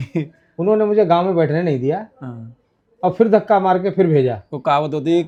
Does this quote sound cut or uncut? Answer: uncut